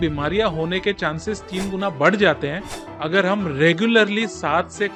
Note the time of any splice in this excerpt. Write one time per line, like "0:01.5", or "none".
none